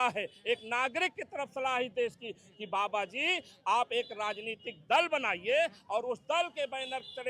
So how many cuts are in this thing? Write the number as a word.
zero